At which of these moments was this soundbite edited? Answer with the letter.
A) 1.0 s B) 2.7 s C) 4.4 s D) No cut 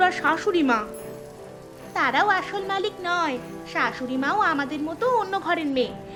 D